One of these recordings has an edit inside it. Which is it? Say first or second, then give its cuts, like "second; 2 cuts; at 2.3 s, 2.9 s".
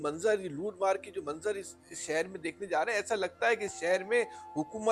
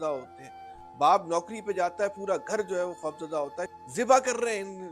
second; 1 cut; at 3.8 s